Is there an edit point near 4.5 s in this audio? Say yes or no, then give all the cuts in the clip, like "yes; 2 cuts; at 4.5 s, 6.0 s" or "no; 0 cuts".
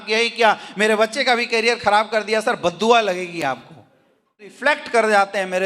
yes; 1 cut; at 4.5 s